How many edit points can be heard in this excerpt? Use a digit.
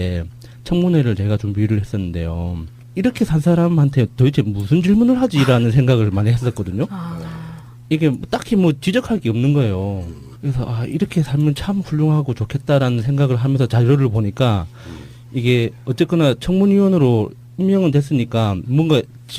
1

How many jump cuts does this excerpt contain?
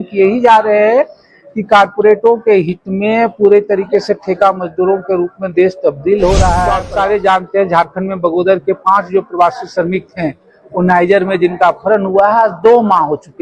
1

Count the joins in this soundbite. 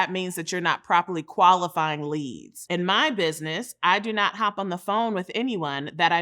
1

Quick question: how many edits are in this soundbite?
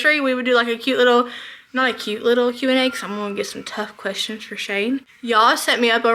0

